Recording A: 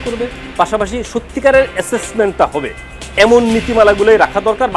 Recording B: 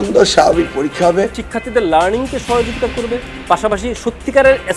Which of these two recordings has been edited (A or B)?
B